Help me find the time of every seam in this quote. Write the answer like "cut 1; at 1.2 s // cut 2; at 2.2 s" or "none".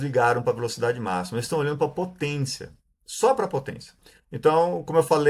cut 1; at 4.0 s